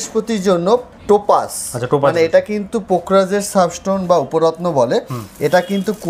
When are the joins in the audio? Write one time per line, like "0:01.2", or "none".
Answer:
0:00.9